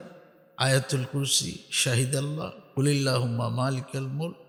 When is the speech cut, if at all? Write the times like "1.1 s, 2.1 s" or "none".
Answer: none